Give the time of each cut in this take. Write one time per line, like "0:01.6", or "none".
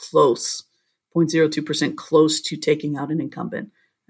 none